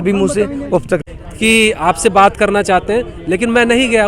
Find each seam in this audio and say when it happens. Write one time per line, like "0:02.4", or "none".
0:01.0